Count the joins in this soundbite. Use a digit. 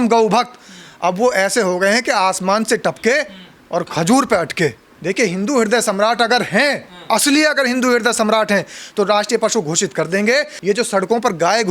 2